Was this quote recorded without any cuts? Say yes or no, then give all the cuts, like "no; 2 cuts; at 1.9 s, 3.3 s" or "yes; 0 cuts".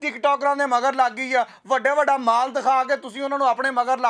yes; 0 cuts